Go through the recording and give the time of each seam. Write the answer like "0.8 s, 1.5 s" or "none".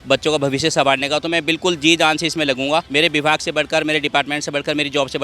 2.9 s

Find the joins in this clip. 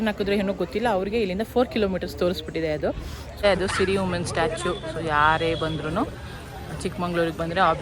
3.4 s

